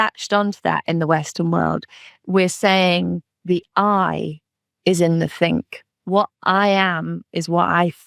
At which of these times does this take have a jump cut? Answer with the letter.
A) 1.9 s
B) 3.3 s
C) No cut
B